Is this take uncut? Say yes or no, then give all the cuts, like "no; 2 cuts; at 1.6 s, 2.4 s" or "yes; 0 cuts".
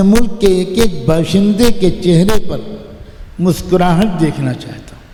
yes; 0 cuts